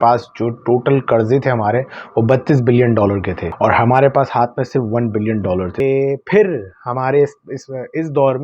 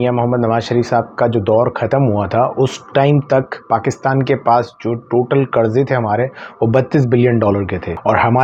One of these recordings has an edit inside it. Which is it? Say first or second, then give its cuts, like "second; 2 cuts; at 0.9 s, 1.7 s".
first; 1 cut; at 5.7 s